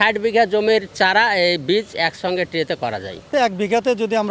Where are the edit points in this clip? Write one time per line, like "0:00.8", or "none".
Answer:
0:03.2